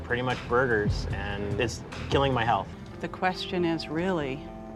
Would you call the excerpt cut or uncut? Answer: uncut